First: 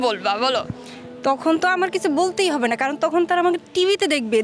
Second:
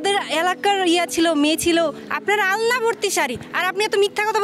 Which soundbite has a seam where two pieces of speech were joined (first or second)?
second